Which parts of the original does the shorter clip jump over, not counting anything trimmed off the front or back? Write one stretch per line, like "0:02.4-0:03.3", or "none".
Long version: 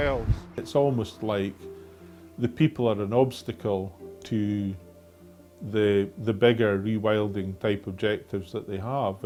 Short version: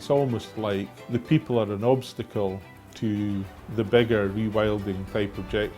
0:01.6-0:02.3
0:04.9-0:06.1

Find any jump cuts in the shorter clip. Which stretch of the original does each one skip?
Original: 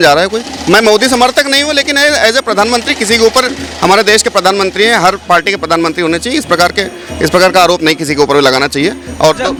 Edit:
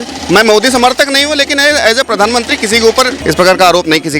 0:03.5-0:07.1

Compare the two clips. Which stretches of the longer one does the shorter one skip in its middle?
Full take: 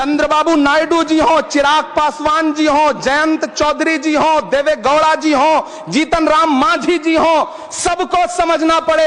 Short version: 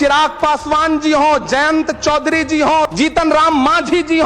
0:04.4-0:05.9

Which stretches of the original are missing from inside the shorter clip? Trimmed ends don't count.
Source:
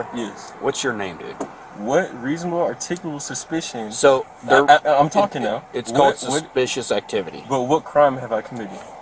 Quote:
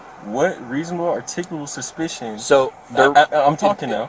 none

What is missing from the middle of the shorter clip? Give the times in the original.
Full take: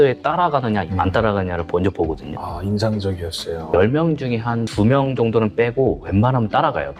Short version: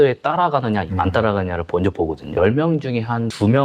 0:02.3-0:03.6

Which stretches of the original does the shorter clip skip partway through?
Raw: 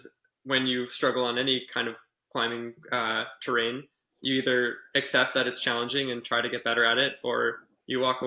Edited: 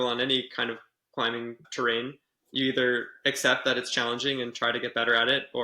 0:02.8-0:03.3

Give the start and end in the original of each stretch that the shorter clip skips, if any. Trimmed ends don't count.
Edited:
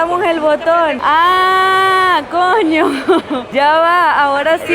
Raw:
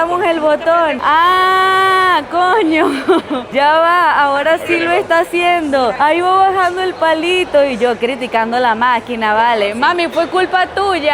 none

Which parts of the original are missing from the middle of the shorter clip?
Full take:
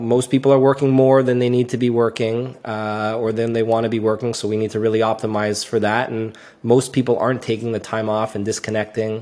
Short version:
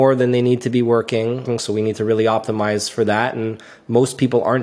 0:02.5-0:04.2

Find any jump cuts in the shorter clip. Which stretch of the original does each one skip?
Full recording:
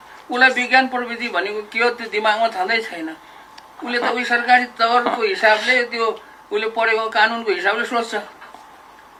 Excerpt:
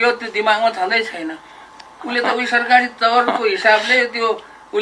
none

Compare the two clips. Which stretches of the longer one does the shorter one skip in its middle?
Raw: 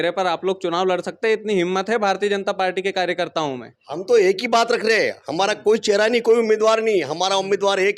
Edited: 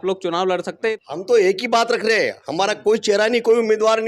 0:01.4-0:03.8

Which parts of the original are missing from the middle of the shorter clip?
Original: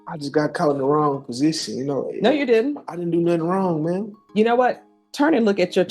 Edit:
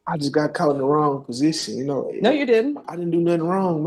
none

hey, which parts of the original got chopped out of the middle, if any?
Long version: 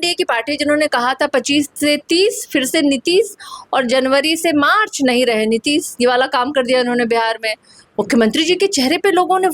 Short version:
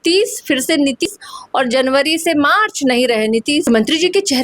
0:03.1-0:03.2
0:05.8-0:08.1

